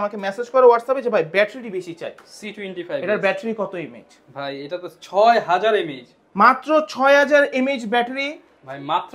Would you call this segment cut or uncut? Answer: uncut